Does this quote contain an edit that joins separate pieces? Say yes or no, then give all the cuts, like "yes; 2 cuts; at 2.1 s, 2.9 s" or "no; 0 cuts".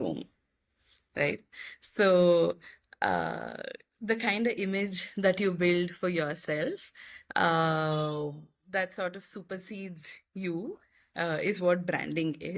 no; 0 cuts